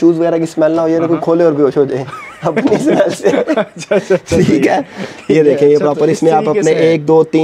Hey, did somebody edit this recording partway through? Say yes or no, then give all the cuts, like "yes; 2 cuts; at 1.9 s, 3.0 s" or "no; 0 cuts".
no; 0 cuts